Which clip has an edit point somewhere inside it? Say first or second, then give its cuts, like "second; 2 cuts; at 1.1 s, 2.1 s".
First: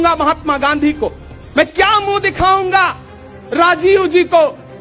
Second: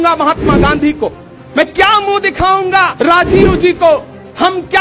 second; 1 cut; at 2.9 s